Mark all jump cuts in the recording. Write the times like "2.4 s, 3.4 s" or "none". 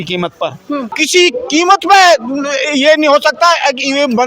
1.0 s